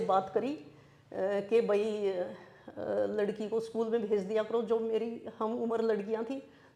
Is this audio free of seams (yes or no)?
yes